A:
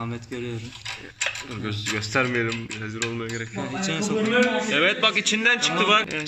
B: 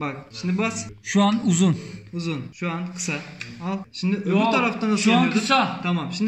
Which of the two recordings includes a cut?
B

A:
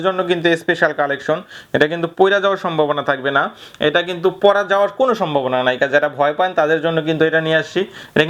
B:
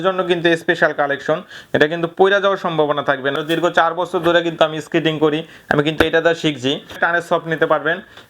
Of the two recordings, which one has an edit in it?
B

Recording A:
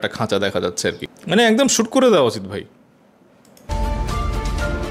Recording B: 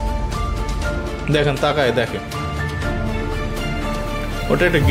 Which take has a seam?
A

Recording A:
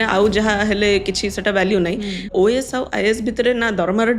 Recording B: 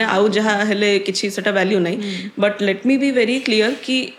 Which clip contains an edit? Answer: A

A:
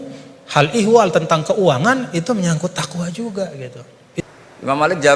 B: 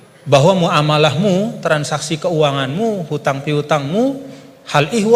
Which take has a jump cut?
A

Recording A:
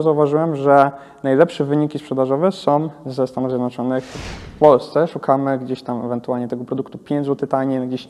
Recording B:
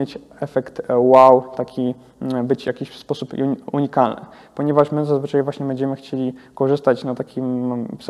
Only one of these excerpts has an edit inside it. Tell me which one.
A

